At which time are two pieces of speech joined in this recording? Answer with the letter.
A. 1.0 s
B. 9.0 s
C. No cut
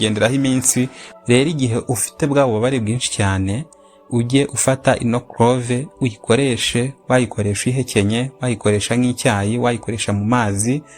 A